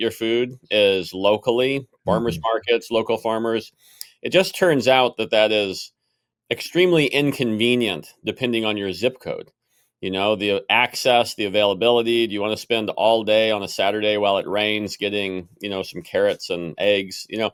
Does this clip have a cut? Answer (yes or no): no